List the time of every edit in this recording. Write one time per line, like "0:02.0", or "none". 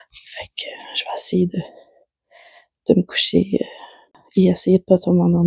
0:04.1